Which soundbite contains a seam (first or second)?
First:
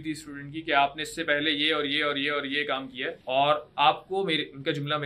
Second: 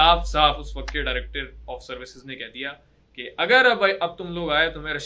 first